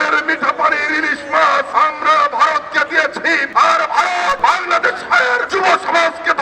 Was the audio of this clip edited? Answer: yes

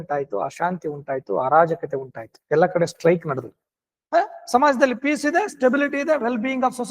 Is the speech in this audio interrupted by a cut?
yes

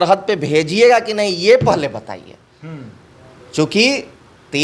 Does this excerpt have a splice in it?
no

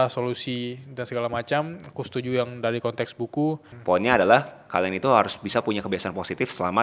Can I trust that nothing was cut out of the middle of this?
no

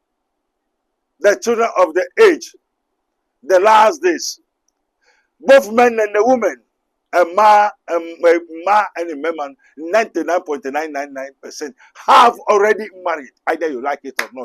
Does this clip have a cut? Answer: no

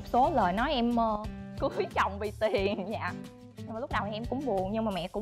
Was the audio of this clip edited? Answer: no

